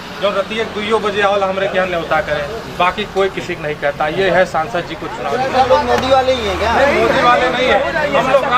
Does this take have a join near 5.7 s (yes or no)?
yes